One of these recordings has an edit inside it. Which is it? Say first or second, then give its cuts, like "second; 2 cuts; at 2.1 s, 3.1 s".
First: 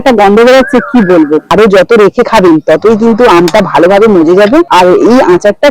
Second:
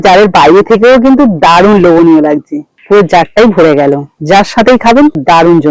first; 2 cuts; at 1.5 s, 4.7 s